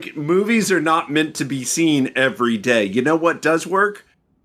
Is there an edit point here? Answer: no; 0 cuts

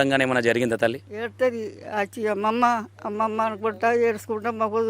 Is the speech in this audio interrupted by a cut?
yes; 1 cut; at 1.1 s

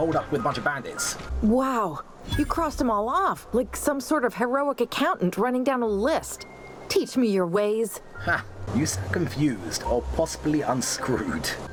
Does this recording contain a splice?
no; 0 cuts

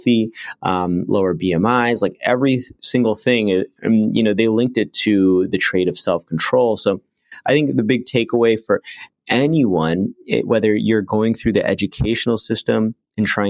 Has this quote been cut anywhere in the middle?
no; 0 cuts

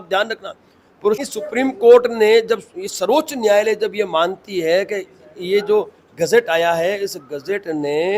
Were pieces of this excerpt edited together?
yes; 1 cut; at 1.2 s

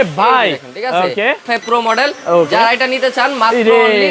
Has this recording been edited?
yes; 1 cut; at 1.5 s

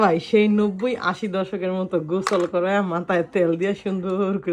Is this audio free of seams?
yes; 0 cuts

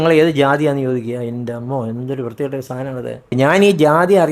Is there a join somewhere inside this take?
yes; 1 cut; at 3.3 s

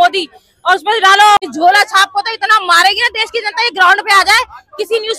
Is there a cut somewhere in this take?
yes; 1 cut; at 1.4 s

